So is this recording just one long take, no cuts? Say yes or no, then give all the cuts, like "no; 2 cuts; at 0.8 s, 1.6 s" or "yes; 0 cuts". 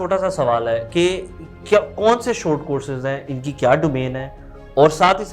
yes; 0 cuts